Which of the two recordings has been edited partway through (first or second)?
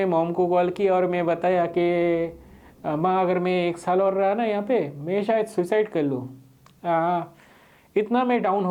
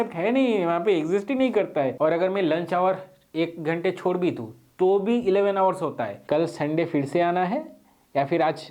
second